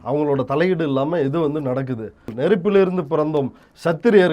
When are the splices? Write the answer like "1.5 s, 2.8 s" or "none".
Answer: 2.3 s